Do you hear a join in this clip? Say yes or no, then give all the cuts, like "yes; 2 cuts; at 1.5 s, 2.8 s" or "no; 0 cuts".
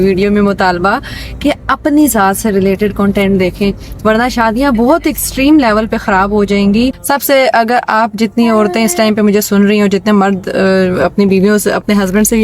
yes; 1 cut; at 7.0 s